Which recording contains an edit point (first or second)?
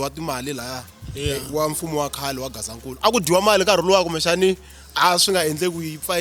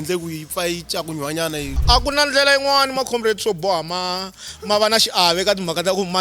second